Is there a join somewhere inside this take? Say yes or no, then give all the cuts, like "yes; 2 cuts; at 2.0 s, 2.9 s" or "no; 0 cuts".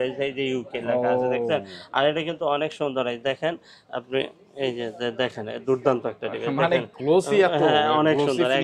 no; 0 cuts